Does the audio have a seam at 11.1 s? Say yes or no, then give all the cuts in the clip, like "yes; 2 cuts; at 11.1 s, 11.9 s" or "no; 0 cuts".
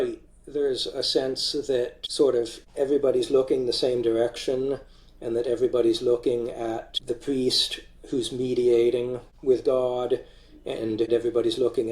yes; 5 cuts; at 2.0 s, 2.6 s, 6.9 s, 9.2 s, 11.1 s